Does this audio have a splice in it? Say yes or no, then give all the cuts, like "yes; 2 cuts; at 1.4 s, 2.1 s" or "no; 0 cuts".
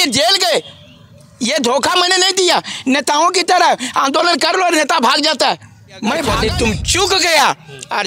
yes; 1 cut; at 6.8 s